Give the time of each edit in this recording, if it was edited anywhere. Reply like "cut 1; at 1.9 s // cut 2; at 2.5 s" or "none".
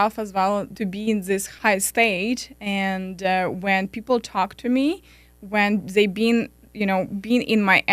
cut 1; at 1.1 s